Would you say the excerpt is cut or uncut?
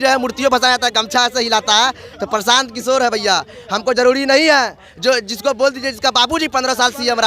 uncut